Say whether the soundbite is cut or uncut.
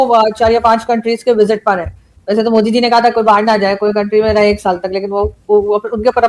uncut